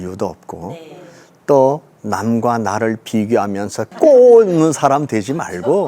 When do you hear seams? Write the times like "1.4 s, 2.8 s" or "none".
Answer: 3.9 s